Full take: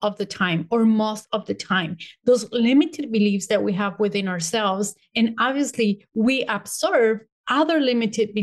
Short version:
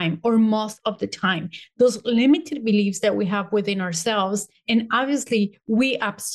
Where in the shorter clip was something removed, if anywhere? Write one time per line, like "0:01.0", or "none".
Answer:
none